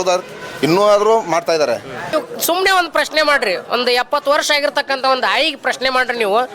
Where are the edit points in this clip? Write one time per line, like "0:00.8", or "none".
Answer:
0:02.0

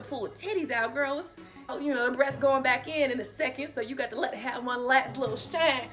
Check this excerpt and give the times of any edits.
0:01.8

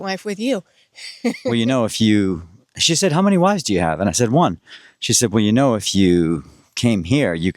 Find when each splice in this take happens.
0:01.4

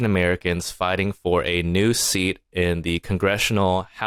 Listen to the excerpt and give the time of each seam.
none

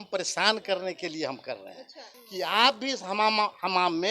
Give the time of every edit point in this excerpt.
0:02.1

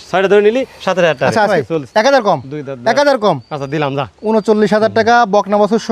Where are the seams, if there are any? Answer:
0:01.5

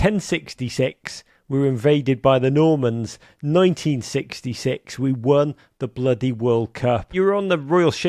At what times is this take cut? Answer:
0:07.1

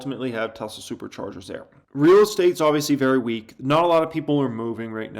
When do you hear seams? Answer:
0:01.8

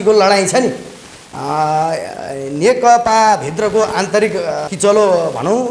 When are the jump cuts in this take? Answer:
0:04.7

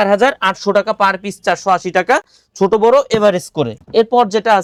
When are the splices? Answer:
none

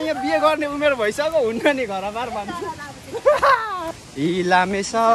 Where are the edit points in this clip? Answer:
0:04.0

